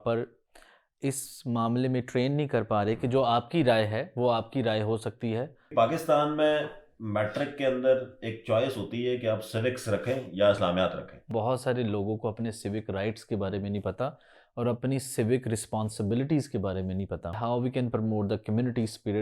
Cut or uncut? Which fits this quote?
cut